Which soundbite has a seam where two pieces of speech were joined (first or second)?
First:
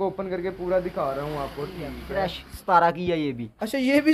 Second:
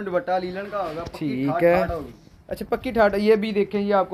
first